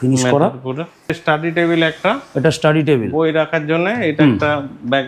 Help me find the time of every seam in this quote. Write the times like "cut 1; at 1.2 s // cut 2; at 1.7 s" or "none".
cut 1; at 1.1 s